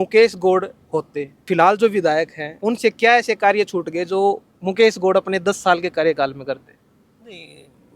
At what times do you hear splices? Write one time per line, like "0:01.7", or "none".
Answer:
0:01.5
0:02.4